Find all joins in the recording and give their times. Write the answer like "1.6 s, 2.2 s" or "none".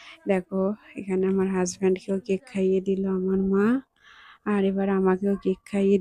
none